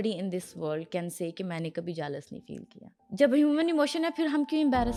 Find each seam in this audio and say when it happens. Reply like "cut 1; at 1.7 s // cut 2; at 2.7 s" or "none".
none

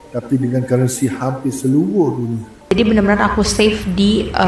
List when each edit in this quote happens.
cut 1; at 2.7 s

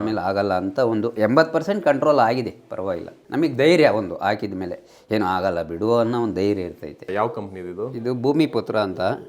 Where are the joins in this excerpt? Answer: cut 1; at 3.2 s // cut 2; at 6.9 s

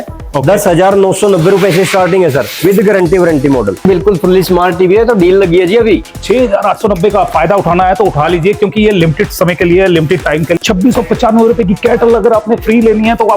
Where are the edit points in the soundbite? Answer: cut 1; at 3.8 s // cut 2; at 10.6 s

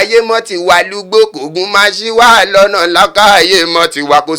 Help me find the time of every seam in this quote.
none

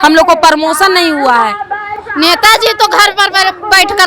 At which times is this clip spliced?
cut 1; at 2.0 s

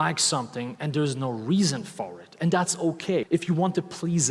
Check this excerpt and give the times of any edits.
cut 1; at 3.3 s

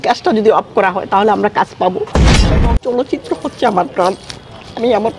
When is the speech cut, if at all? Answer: cut 1; at 2.4 s

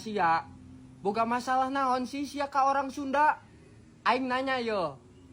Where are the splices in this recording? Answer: none

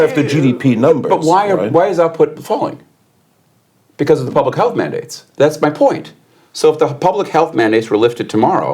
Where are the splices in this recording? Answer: cut 1; at 5.2 s

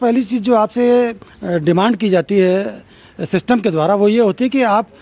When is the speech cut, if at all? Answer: none

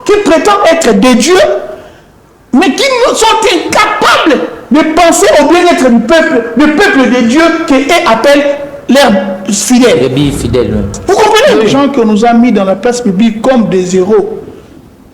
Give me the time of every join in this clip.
cut 1; at 11.6 s

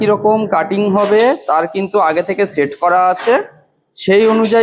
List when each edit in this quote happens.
none

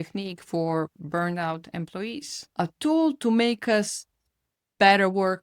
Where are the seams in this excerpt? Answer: cut 1; at 2.3 s

